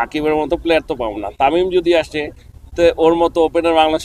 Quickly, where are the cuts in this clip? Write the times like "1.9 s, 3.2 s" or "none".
none